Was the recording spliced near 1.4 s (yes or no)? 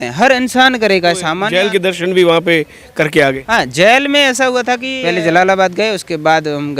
yes